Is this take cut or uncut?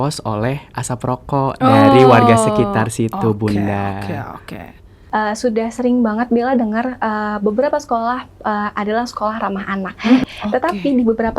cut